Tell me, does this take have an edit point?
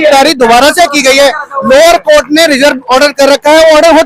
no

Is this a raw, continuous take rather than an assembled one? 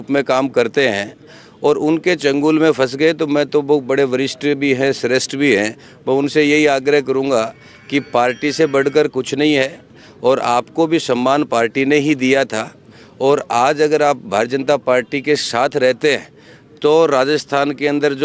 yes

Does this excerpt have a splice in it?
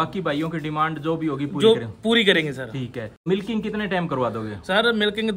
yes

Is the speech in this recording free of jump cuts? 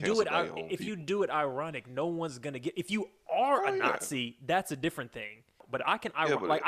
no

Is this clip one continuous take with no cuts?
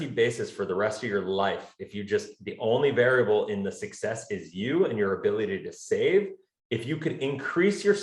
yes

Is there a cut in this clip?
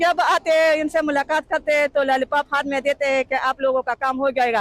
no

